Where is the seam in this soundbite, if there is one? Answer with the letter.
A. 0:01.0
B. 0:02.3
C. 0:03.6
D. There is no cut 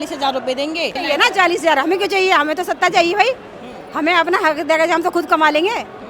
A